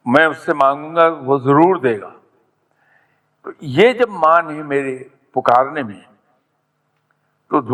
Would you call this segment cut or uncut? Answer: uncut